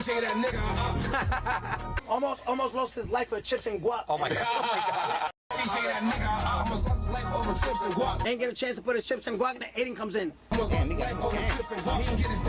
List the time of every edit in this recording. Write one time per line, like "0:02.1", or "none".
none

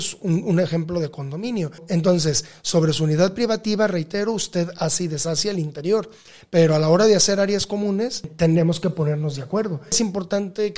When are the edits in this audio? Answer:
0:01.8
0:08.3
0:10.0

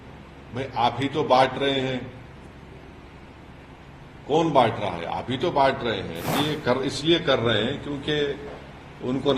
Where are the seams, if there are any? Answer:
0:06.3

